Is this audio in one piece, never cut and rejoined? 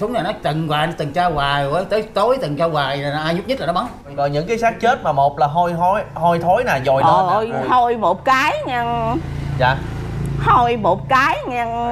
no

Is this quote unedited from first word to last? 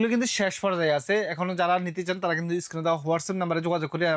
yes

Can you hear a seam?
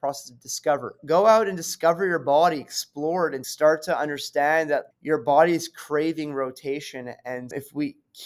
yes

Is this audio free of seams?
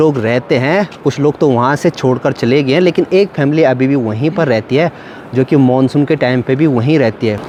yes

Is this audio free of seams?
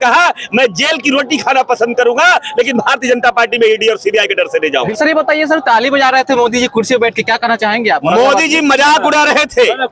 yes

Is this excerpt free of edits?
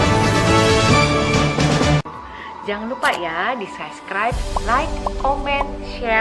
yes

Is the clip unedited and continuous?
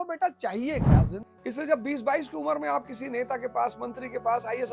no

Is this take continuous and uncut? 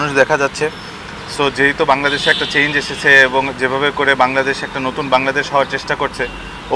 yes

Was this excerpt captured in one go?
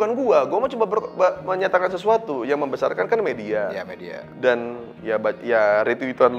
yes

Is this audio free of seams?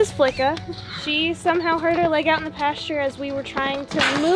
yes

